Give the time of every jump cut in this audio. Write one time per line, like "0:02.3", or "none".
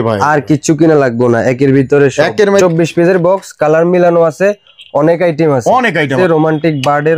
0:02.6
0:06.1